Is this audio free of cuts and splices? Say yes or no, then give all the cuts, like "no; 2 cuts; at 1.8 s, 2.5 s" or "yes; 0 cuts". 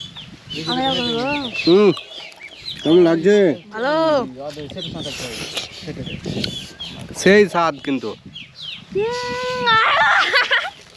yes; 0 cuts